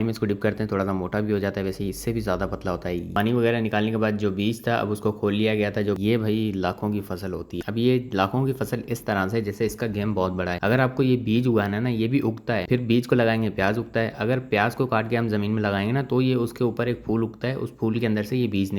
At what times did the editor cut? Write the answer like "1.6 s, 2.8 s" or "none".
3.1 s, 6.0 s, 7.6 s